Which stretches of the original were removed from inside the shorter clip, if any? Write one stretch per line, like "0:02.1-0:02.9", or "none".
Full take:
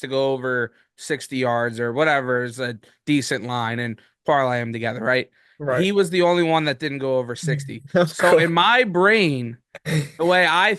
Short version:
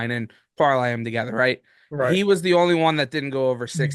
none